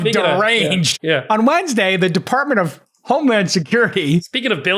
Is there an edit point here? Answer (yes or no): no